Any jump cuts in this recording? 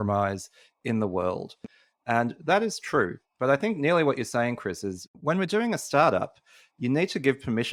no; 0 cuts

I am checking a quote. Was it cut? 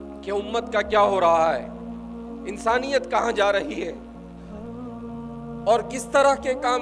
yes; 2 cuts; at 3.9 s, 5.3 s

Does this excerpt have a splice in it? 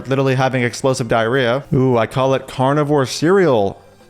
yes; 1 cut; at 1.6 s

